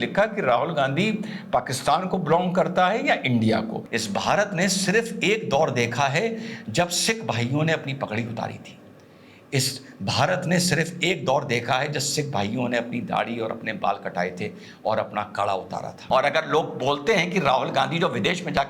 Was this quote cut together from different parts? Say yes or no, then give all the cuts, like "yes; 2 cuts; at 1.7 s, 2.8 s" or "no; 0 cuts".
yes; 2 cuts; at 3.8 s, 16.0 s